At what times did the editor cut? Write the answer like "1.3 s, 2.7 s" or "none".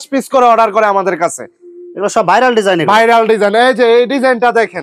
none